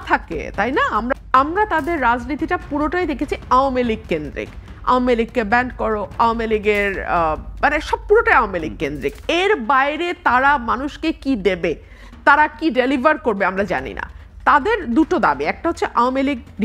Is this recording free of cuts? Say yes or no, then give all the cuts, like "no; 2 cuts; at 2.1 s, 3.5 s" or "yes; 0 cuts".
no; 1 cut; at 1.1 s